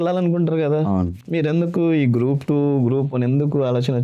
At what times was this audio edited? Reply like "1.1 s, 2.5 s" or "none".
none